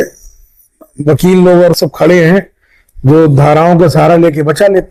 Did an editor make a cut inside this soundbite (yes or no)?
no